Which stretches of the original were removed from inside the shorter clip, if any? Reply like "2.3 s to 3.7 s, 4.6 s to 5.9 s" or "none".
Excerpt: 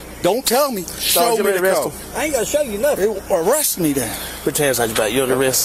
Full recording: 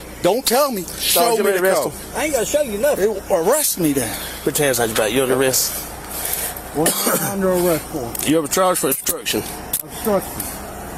none